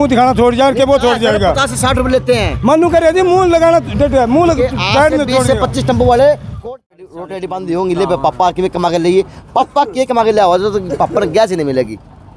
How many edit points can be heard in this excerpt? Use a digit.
1